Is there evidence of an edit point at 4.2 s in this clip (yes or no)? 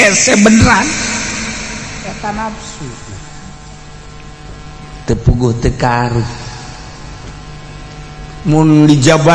no